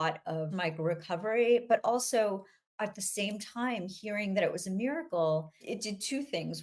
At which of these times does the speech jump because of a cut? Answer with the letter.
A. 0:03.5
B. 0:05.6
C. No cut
B